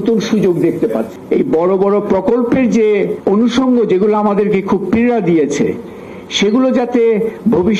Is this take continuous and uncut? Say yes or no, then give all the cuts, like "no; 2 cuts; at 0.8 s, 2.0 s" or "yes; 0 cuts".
no; 2 cuts; at 1.1 s, 3.2 s